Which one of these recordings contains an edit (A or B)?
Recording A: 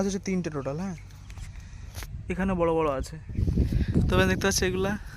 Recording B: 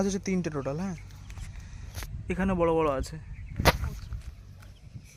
A